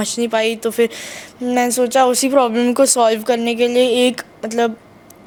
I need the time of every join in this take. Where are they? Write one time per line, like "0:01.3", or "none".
none